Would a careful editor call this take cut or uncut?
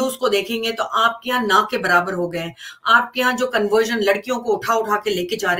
uncut